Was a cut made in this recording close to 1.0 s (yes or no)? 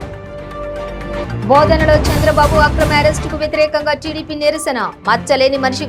yes